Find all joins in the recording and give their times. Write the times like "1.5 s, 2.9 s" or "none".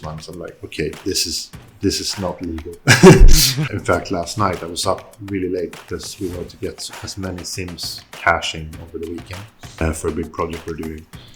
3.5 s, 9.8 s

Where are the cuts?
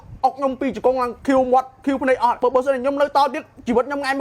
1.1 s, 2.4 s

